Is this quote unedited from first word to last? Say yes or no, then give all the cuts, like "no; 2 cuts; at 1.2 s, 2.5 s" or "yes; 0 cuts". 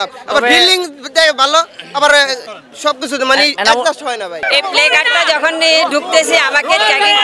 no; 1 cut; at 4.3 s